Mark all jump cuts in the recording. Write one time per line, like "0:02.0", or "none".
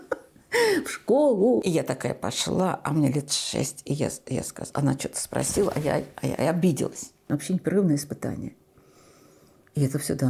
0:01.6
0:07.2